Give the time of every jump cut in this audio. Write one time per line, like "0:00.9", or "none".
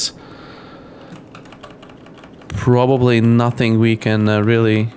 0:01.5